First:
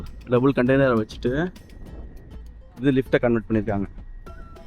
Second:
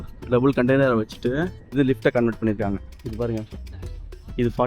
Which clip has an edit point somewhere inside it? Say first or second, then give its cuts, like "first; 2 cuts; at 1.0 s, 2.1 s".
second; 2 cuts; at 1.6 s, 2.9 s